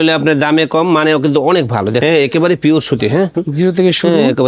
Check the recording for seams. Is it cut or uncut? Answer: cut